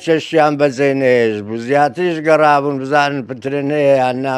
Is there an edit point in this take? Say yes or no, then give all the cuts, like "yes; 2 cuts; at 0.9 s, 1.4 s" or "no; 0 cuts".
no; 0 cuts